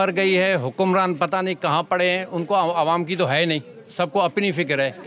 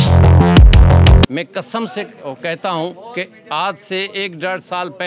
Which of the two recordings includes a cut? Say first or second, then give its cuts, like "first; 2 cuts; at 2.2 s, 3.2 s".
second; 1 cut; at 1.3 s